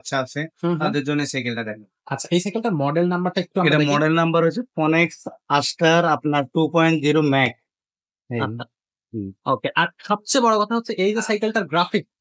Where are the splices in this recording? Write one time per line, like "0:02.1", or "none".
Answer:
none